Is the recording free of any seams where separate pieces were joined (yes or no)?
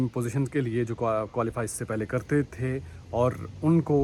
yes